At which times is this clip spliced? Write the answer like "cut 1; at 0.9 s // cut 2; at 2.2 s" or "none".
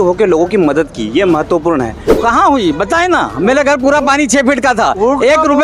cut 1; at 2.1 s